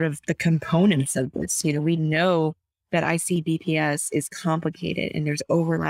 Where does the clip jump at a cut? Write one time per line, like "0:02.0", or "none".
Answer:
none